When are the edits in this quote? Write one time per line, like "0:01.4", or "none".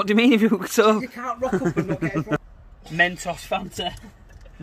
0:02.4